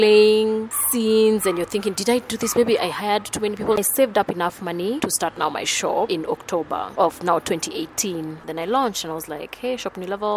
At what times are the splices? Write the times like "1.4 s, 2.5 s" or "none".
3.8 s, 8.4 s